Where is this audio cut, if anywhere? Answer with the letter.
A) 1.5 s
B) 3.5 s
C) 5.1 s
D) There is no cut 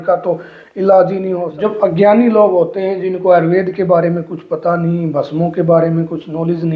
A